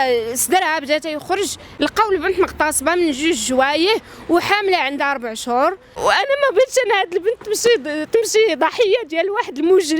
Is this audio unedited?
no; 2 cuts; at 1.6 s, 5.9 s

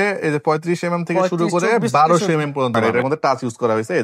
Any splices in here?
yes; 1 cut; at 2.8 s

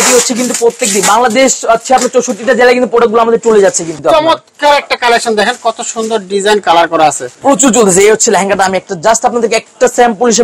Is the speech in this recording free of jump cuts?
no; 2 cuts; at 3.9 s, 7.3 s

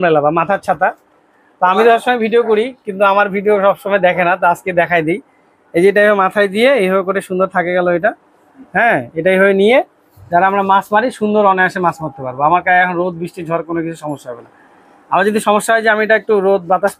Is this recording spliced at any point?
no; 0 cuts

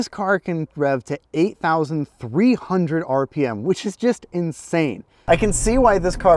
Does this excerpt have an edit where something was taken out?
yes; 1 cut; at 5.1 s

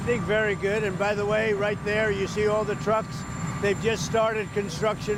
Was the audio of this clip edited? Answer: no; 0 cuts

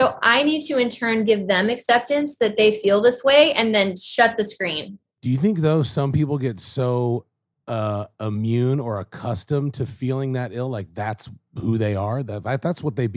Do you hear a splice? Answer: yes; 1 cut; at 5.1 s

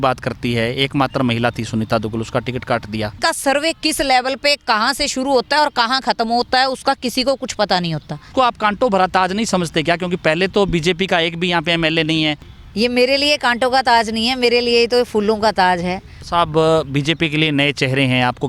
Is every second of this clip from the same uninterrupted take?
no; 4 cuts; at 3.2 s, 8.3 s, 12.5 s, 16.1 s

